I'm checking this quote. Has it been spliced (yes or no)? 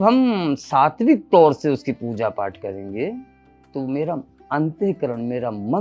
no